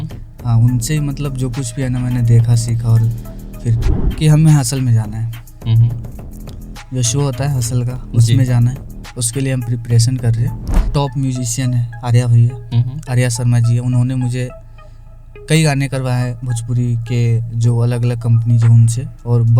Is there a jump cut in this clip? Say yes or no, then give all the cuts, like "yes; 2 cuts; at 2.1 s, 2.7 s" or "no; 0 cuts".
yes; 2 cuts; at 3.8 s, 10.9 s